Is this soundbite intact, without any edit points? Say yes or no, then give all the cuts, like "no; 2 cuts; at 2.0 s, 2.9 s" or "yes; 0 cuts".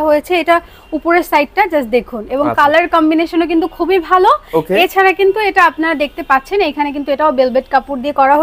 yes; 0 cuts